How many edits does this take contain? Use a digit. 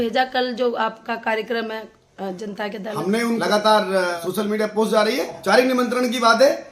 3